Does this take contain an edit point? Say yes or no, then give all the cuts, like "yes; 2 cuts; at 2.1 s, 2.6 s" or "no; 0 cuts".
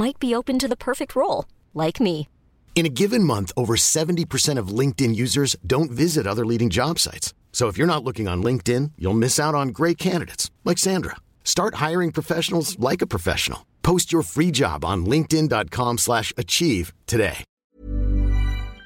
yes; 1 cut; at 17.5 s